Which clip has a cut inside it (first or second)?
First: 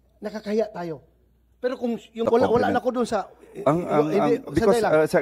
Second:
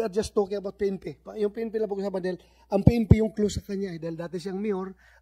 first